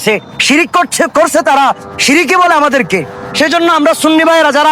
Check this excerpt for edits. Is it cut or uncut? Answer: uncut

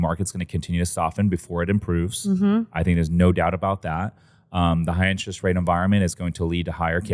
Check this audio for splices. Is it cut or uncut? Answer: uncut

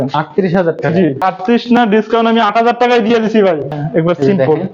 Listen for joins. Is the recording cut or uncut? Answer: cut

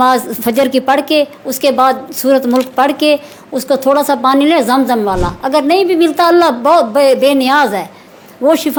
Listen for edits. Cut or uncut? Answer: uncut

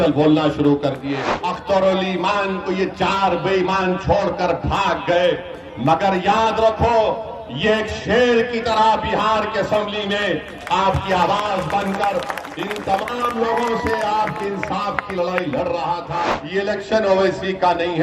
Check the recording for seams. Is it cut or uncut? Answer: cut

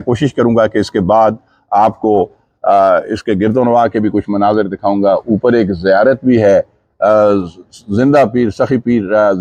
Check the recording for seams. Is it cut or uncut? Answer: uncut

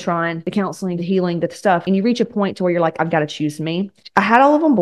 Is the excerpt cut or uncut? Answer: cut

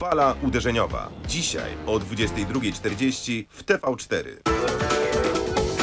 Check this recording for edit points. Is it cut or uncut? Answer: cut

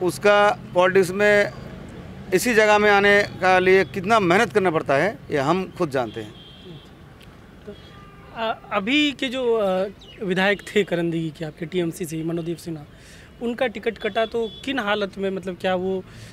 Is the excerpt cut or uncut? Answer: uncut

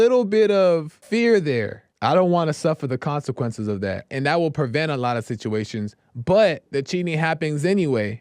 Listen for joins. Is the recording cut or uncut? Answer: cut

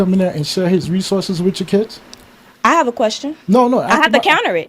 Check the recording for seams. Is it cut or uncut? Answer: cut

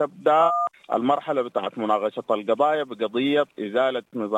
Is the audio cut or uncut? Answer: uncut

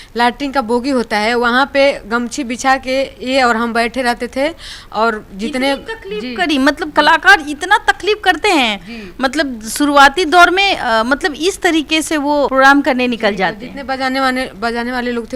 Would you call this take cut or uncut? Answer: uncut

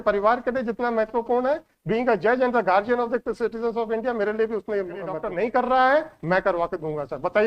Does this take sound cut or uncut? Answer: cut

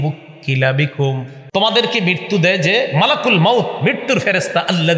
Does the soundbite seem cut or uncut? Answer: cut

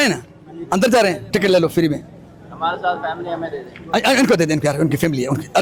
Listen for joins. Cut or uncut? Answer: uncut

